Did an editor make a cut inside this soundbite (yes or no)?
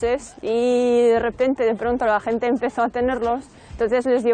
no